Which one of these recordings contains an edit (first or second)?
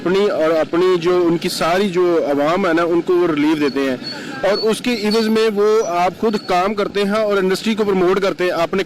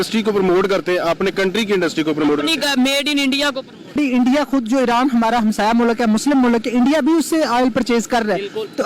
second